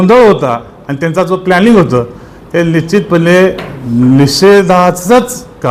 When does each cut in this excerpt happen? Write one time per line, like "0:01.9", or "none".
none